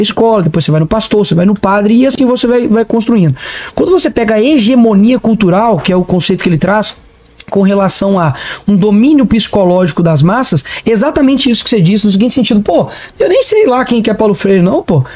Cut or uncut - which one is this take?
uncut